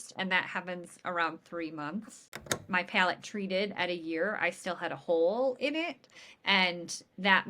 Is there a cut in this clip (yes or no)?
yes